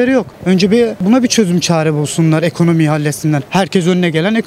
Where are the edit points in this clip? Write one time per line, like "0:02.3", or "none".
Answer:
0:00.8
0:03.4